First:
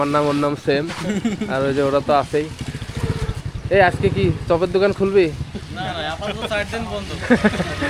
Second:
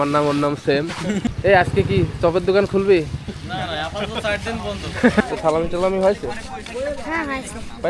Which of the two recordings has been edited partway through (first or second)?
second